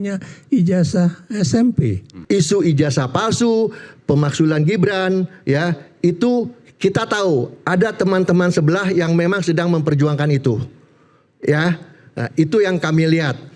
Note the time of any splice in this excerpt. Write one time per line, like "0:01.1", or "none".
0:02.1